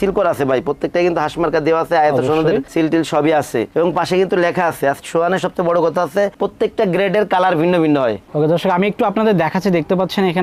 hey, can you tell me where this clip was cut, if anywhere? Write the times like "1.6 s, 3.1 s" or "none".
8.2 s